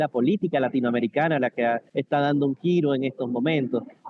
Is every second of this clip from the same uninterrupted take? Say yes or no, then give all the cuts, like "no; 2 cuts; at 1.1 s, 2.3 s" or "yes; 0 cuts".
no; 1 cut; at 1.9 s